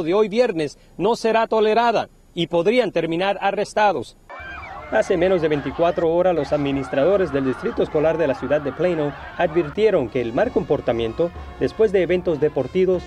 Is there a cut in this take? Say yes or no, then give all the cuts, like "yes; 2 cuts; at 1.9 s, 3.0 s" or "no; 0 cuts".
no; 0 cuts